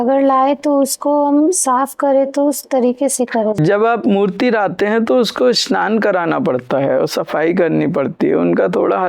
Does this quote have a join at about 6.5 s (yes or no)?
no